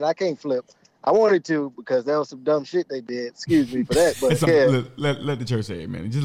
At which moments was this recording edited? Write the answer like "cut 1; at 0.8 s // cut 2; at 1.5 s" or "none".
cut 1; at 4.5 s